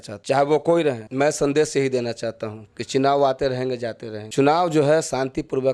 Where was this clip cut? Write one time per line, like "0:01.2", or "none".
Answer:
0:01.0